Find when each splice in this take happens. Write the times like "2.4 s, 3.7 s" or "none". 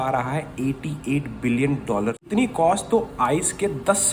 2.2 s